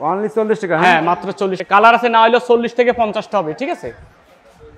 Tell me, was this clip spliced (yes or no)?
yes